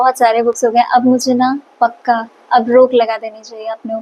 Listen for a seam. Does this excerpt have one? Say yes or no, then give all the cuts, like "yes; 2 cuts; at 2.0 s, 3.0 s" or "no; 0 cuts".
no; 0 cuts